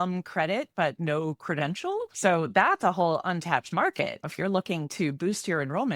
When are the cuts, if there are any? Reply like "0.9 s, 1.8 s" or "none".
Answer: 2.1 s

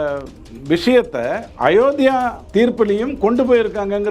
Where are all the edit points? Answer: 1.4 s, 2.4 s

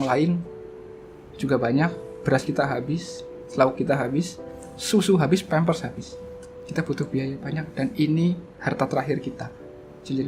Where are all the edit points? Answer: none

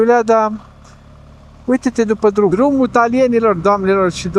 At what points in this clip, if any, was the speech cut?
2.5 s

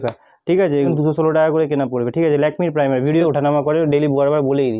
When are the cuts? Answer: 0.9 s, 3.2 s

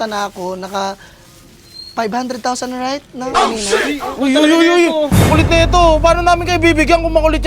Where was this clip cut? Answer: none

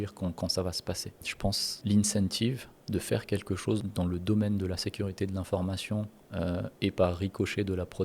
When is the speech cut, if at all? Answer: 1.7 s, 3.8 s

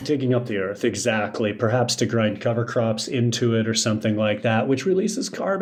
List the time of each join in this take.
none

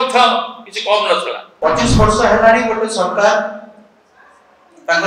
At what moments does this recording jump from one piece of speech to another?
1.4 s

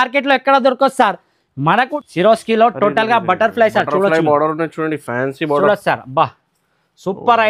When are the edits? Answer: 1.9 s

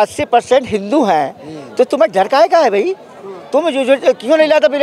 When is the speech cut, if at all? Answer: none

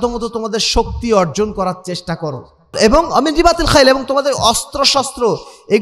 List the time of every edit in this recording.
2.7 s

